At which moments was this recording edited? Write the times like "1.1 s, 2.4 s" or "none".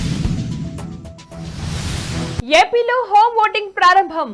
none